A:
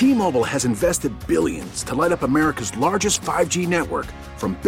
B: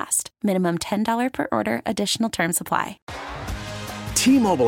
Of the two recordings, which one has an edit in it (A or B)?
B